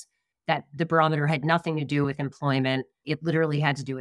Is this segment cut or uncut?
cut